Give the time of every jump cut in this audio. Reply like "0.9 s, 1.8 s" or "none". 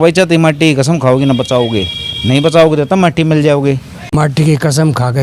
4.1 s